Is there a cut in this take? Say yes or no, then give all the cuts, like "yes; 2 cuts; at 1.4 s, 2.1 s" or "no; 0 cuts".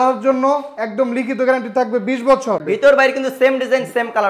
yes; 1 cut; at 2.6 s